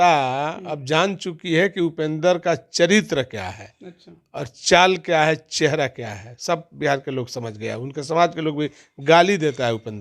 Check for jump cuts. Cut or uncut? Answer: uncut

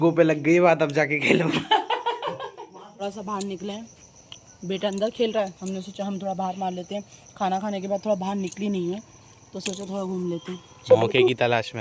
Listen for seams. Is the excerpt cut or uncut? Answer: uncut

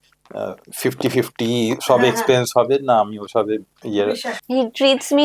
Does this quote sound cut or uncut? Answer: cut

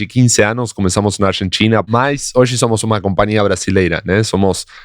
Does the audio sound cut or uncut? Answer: cut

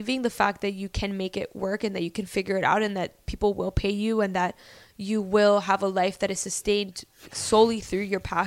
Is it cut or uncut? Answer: uncut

